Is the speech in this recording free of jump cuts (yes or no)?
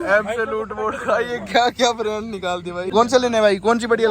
no